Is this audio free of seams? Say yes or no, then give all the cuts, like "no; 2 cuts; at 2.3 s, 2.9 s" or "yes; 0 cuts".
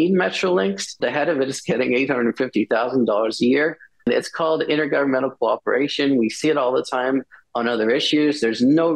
no; 2 cuts; at 1.0 s, 4.0 s